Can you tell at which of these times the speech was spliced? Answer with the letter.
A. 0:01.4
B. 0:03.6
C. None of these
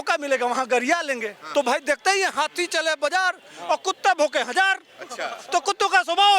A